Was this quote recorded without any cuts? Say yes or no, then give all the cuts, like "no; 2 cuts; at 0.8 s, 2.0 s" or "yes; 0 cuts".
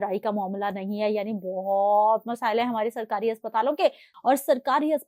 no; 1 cut; at 4.1 s